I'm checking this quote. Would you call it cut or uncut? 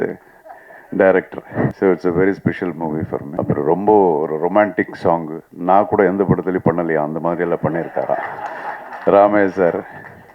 cut